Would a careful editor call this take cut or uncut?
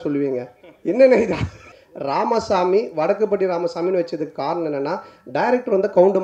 cut